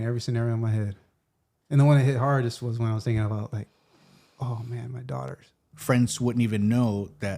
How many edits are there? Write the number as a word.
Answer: one